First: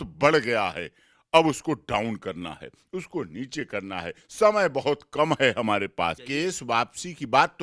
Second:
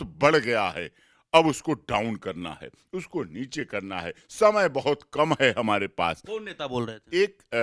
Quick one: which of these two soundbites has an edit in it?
first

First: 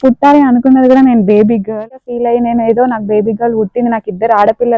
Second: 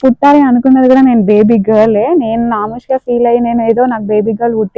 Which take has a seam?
first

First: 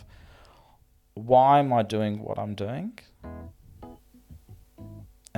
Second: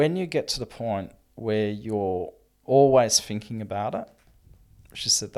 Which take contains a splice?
second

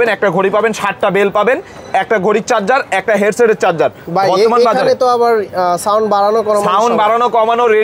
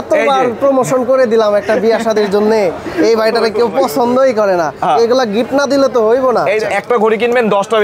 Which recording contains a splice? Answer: second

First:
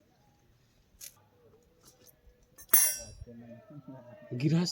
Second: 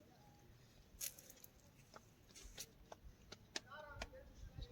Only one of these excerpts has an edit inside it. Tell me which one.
first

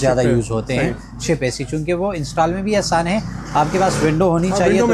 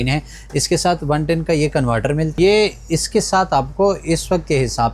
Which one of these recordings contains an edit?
second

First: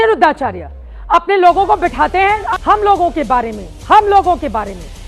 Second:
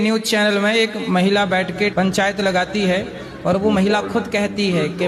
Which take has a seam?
first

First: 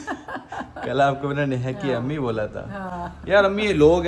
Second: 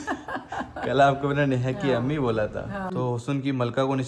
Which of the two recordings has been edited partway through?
second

